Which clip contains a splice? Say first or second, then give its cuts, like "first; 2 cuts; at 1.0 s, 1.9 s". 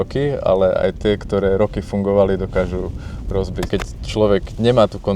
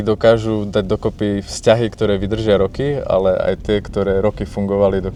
first; 1 cut; at 3.6 s